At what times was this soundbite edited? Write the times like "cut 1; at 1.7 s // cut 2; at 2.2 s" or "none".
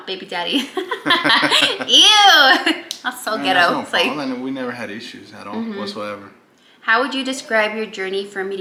none